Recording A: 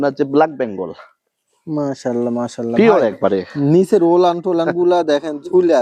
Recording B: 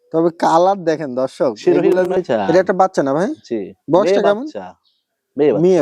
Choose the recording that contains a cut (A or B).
B